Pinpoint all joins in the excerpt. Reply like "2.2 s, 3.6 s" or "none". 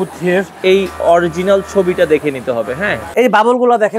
3.0 s

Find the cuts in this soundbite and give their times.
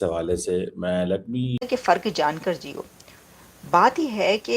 1.6 s

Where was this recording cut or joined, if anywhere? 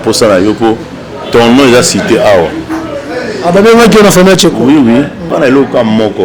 5.3 s

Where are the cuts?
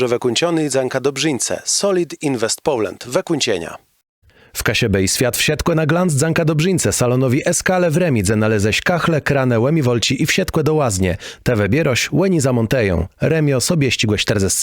4.2 s

